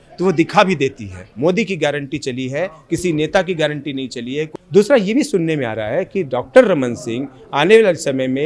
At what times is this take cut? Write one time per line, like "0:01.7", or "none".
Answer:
0:01.3
0:04.4